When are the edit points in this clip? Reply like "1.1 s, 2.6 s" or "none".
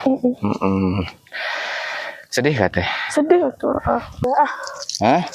4.3 s

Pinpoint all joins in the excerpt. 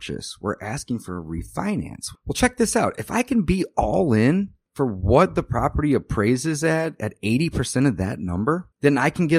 2.0 s, 4.6 s

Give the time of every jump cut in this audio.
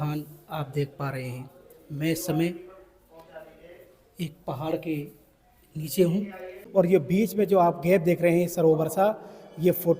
6.6 s

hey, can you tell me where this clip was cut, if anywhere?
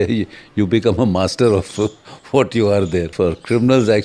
3.1 s

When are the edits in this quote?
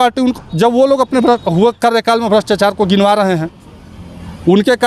none

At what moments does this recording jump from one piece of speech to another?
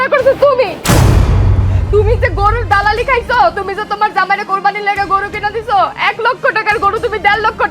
1.6 s

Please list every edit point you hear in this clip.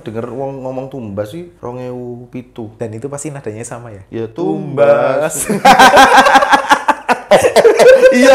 1.5 s, 2.7 s

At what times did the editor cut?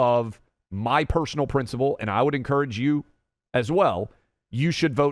none

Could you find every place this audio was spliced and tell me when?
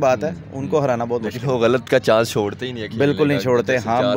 none

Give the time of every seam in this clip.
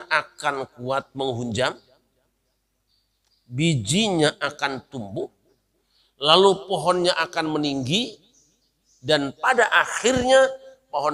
none

